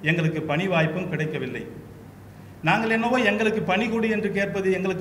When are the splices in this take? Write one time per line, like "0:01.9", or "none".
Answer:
none